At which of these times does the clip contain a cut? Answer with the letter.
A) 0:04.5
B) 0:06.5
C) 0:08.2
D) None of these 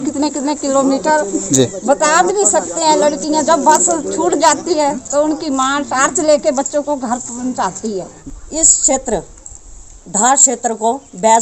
C